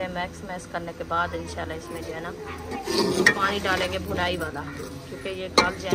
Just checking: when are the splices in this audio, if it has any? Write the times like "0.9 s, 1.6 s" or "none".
none